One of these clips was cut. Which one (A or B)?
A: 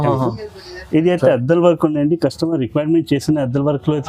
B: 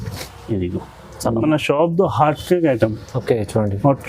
B